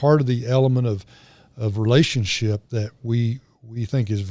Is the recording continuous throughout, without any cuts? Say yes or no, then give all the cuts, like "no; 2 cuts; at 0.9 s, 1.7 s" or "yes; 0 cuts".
yes; 0 cuts